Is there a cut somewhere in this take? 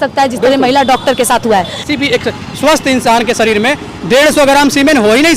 yes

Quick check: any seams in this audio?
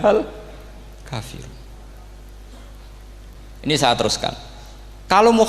yes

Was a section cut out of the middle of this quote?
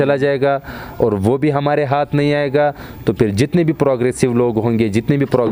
no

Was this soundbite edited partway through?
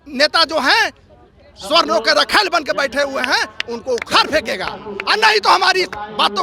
no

